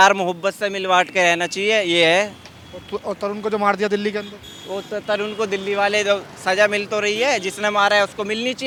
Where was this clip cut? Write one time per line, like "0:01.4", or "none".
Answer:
none